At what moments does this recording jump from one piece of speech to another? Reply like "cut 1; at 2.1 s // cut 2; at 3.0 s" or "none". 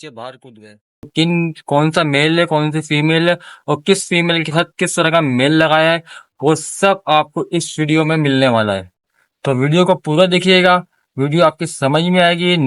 cut 1; at 1.1 s